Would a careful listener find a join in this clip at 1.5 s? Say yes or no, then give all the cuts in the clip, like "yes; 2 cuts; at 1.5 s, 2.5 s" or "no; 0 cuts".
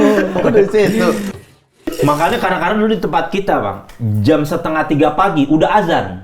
yes; 1 cut; at 1.5 s